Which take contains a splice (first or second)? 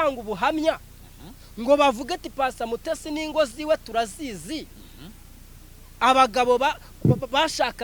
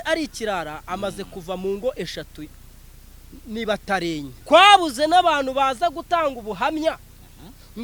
second